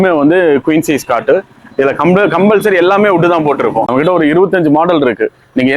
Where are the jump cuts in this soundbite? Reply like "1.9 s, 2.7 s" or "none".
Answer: 3.9 s

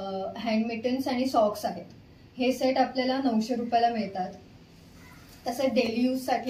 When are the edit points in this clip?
none

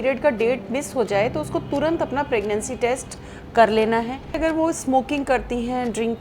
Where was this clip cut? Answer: 4.4 s

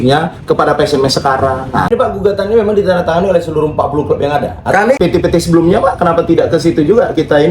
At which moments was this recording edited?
1.9 s, 5.0 s

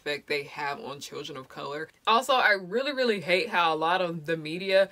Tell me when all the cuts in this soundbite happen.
1.9 s

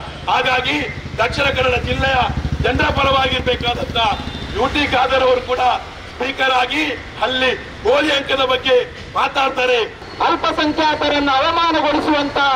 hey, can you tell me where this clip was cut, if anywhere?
10.0 s

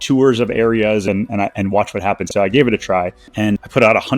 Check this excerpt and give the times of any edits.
1.0 s, 2.2 s, 3.2 s

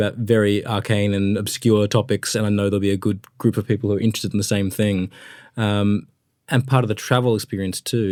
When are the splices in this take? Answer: none

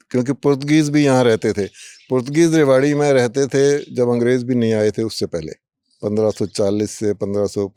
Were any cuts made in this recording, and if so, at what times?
none

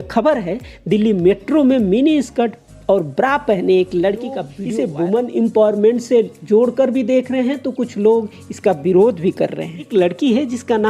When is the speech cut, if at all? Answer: 4.5 s, 9.9 s

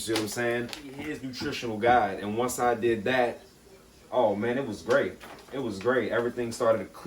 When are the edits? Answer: 1.2 s

